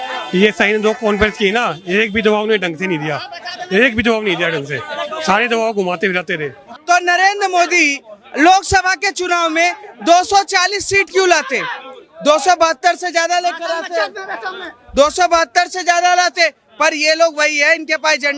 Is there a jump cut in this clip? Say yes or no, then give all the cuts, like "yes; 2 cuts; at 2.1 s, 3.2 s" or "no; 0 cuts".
yes; 1 cut; at 6.7 s